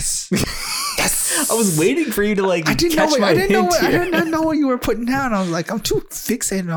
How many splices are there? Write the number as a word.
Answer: zero